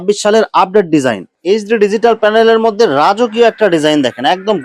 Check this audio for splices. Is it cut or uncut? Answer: cut